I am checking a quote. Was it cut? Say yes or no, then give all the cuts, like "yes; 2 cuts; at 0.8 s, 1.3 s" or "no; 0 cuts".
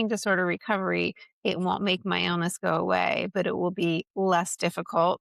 no; 0 cuts